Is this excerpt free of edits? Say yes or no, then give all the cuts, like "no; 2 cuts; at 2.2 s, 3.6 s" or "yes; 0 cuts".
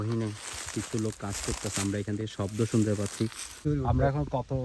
no; 1 cut; at 3.6 s